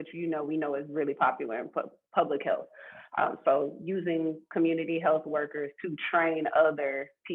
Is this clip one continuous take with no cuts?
yes; 0 cuts

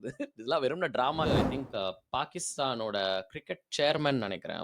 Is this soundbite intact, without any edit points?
no; 1 cut; at 1.3 s

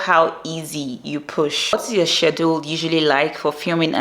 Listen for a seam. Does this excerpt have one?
yes; 1 cut; at 1.7 s

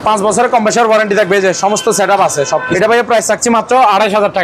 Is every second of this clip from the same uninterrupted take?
no; 1 cut; at 2.7 s

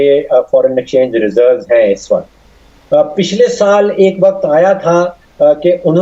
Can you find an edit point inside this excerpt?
no; 0 cuts

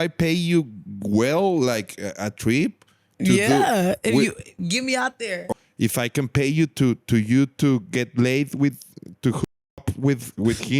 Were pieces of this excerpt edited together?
yes; 1 cut; at 5.5 s

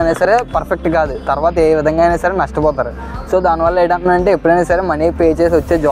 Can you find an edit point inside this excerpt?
no; 0 cuts

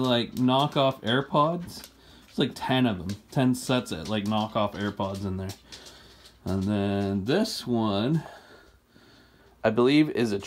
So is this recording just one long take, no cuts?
yes; 0 cuts

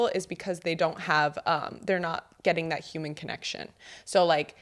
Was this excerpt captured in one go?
yes; 0 cuts

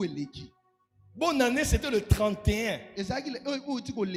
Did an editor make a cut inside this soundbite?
no; 0 cuts

